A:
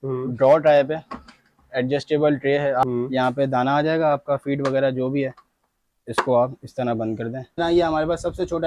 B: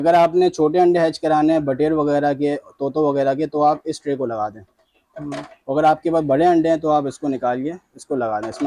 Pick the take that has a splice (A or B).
A